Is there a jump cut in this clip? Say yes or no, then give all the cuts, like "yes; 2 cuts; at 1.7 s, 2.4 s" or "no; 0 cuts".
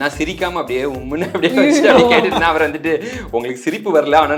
no; 0 cuts